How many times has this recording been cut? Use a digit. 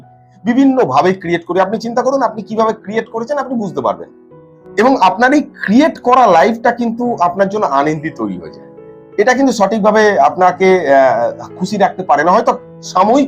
0